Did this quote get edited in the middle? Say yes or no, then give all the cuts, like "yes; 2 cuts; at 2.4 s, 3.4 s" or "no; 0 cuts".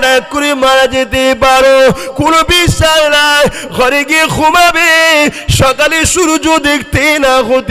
no; 0 cuts